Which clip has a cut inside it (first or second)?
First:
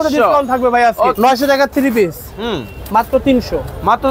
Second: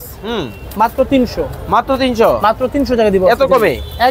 first